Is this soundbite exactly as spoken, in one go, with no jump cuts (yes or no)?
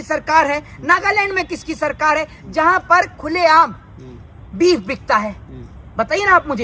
yes